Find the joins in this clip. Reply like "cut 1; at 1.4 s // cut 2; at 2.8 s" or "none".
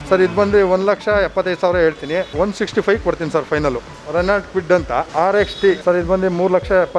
cut 1; at 3.9 s // cut 2; at 5.1 s // cut 3; at 5.8 s